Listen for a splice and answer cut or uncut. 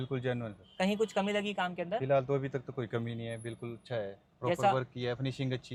uncut